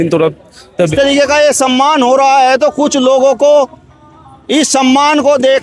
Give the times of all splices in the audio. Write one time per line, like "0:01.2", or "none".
0:00.9

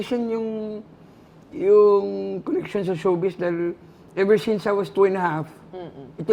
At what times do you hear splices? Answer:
none

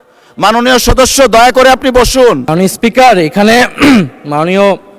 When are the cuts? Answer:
0:02.5

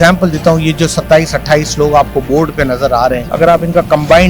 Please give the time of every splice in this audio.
0:03.2

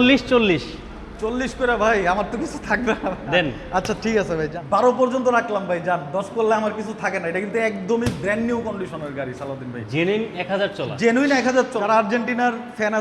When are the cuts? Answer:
0:04.5
0:11.8

